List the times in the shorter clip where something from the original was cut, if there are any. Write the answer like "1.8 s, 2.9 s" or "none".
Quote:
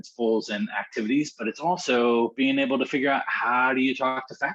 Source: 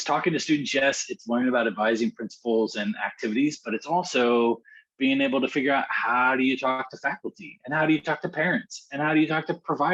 2.3 s